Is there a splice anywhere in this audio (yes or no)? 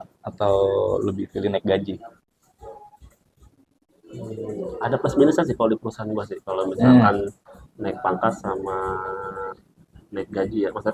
no